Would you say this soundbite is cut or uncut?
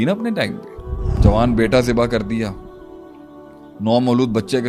cut